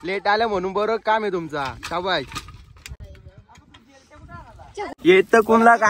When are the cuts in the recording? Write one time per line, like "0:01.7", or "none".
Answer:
none